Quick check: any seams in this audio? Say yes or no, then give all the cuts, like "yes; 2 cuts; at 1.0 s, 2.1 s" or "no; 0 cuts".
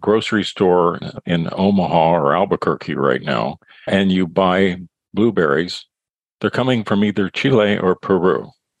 yes; 2 cuts; at 1.1 s, 3.9 s